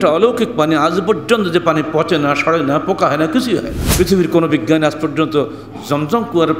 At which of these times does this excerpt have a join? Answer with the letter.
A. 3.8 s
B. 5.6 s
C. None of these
A